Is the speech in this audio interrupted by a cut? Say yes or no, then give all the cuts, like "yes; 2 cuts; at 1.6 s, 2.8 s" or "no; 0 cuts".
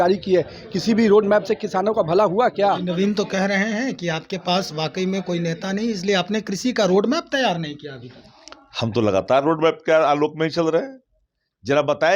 yes; 1 cut; at 2.8 s